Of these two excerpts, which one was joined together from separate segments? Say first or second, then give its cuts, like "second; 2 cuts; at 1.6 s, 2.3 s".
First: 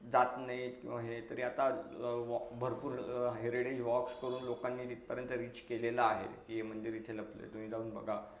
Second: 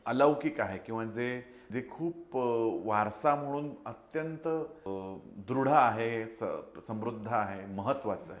second; 2 cuts; at 1.5 s, 4.8 s